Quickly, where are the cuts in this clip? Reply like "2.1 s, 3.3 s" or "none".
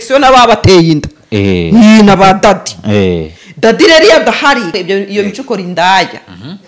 4.7 s

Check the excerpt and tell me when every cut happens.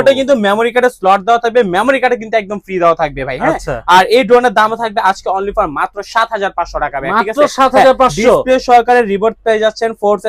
none

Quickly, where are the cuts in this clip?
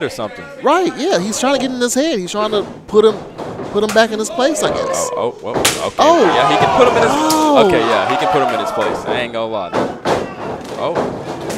none

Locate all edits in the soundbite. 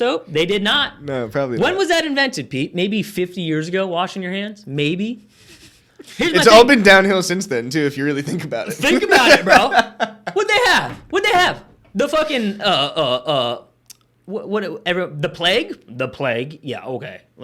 none

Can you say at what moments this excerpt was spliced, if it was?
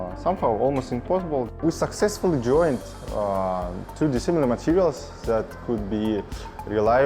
1.5 s

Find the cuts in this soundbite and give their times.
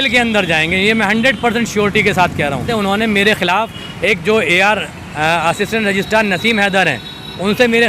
2.7 s

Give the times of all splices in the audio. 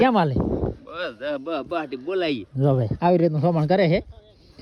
none

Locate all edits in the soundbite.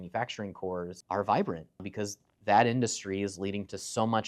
1.0 s, 1.9 s

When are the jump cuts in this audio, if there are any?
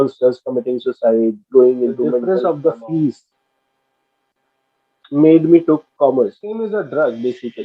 2.2 s, 6.6 s

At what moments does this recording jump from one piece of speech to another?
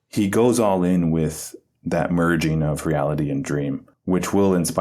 3.9 s

